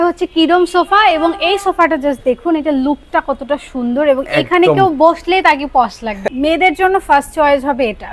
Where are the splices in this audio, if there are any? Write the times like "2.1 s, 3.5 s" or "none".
6.2 s